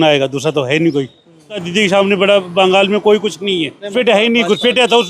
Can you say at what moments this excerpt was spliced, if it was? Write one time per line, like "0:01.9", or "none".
0:01.7
0:03.9